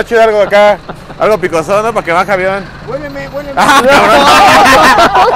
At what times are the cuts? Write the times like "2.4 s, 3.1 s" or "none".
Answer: none